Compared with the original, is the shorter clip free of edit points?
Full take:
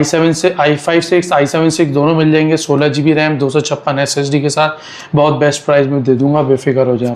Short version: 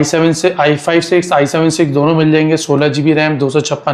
yes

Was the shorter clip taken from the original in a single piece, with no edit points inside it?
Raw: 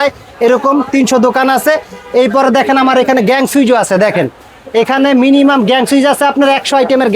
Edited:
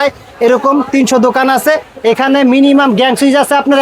no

